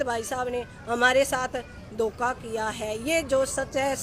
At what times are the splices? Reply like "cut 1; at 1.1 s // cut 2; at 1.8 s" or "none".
none